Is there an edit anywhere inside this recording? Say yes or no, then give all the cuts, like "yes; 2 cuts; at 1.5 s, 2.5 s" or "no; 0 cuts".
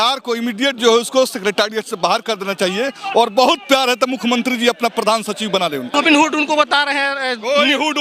yes; 1 cut; at 5.9 s